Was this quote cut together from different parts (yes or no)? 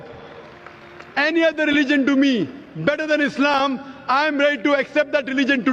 no